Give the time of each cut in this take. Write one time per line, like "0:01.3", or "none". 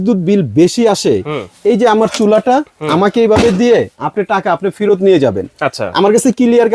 none